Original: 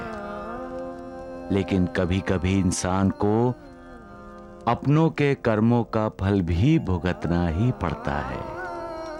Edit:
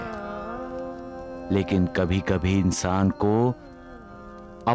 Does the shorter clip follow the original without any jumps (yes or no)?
yes